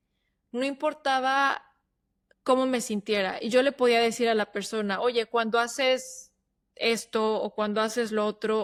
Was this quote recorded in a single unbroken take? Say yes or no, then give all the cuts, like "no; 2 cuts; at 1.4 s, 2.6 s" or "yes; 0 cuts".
yes; 0 cuts